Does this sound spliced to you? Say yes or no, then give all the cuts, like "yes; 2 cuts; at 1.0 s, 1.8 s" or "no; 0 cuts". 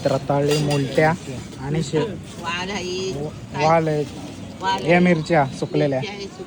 no; 0 cuts